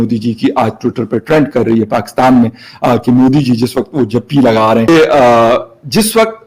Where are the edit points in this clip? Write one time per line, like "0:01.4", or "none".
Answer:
0:04.9